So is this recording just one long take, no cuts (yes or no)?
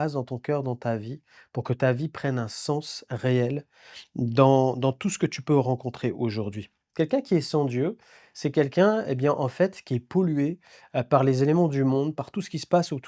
no